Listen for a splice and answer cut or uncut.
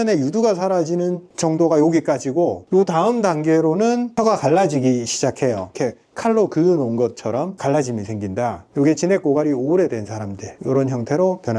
cut